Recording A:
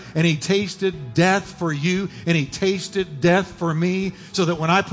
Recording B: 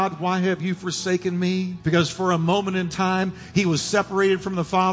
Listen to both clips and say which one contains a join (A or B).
B